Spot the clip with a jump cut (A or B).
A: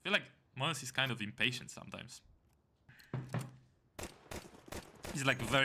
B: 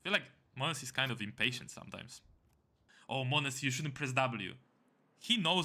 B